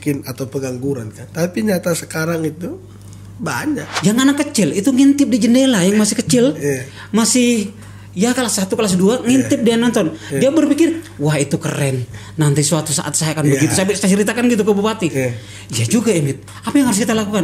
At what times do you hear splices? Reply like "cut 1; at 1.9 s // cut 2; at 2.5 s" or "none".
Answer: cut 1; at 1.2 s // cut 2; at 3.9 s